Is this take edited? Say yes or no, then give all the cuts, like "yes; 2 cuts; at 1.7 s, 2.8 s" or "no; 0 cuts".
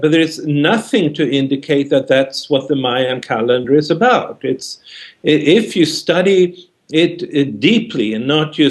no; 0 cuts